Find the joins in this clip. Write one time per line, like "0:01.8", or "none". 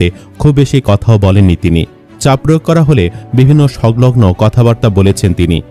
none